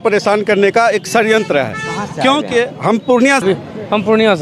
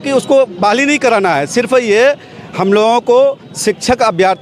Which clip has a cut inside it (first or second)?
first